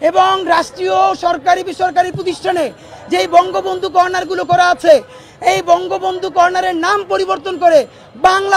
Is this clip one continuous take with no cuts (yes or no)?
yes